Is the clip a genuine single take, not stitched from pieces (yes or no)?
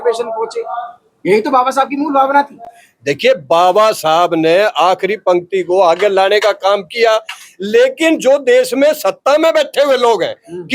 yes